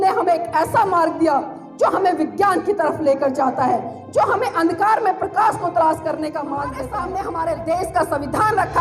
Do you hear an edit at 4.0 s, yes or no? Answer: no